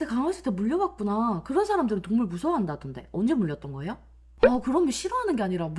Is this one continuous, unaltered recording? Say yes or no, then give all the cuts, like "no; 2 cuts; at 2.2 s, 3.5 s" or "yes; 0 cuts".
yes; 0 cuts